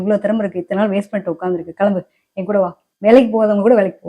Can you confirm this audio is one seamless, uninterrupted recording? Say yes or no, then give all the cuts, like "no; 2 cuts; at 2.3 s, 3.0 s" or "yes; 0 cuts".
no; 1 cut; at 2.8 s